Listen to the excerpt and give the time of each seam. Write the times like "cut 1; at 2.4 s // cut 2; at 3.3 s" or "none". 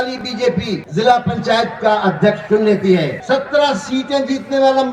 cut 1; at 0.8 s // cut 2; at 3.2 s